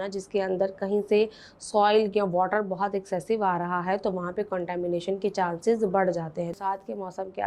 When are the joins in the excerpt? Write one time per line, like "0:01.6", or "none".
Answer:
0:06.6